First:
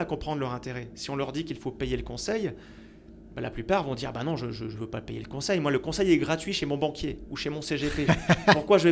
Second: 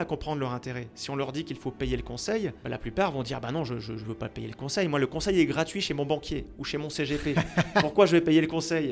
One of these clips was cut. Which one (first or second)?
second